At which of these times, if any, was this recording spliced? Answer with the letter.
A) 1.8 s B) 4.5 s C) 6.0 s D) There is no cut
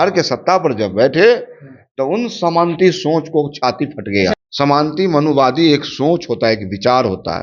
B